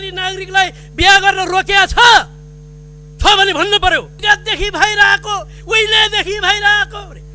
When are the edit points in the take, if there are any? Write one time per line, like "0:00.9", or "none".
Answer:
0:04.1